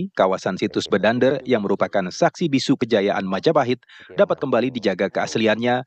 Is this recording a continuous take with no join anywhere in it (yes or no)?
yes